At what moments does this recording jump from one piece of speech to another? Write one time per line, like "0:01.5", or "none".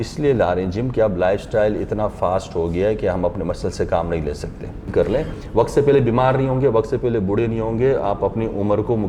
0:04.9